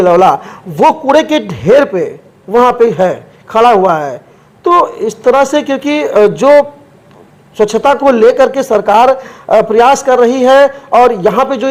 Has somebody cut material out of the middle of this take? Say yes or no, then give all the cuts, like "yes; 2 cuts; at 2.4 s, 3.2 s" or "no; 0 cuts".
no; 0 cuts